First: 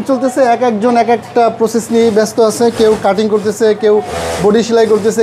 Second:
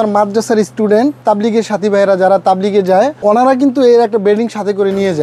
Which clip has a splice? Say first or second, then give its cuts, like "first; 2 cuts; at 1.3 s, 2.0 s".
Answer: second; 2 cuts; at 1.2 s, 3.1 s